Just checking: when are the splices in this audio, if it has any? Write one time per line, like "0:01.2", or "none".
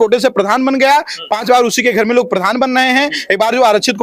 none